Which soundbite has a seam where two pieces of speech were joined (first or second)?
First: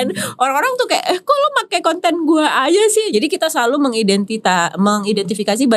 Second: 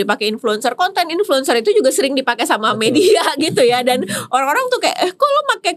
first